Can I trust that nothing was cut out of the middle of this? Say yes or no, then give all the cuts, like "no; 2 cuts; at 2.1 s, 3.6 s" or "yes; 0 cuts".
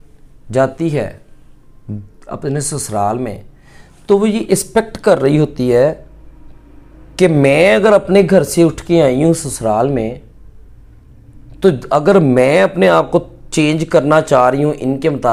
yes; 0 cuts